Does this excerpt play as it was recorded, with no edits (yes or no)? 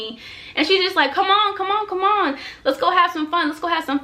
yes